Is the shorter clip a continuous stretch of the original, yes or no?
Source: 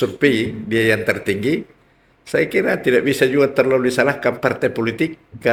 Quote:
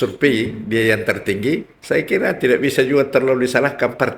no